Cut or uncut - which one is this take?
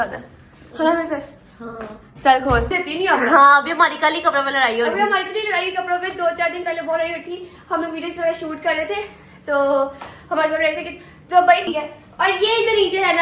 cut